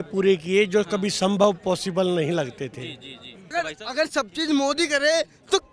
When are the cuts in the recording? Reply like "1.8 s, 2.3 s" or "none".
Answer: 3.4 s